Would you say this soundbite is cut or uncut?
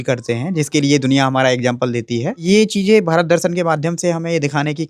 cut